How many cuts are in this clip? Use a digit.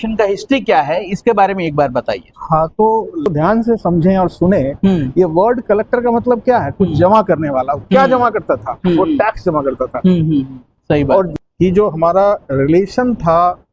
2